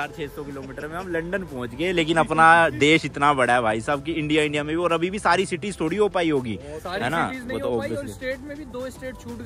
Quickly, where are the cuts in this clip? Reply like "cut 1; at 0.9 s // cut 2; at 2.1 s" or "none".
none